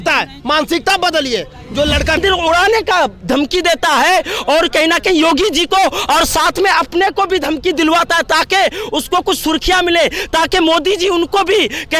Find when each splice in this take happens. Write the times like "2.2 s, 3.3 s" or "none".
2.2 s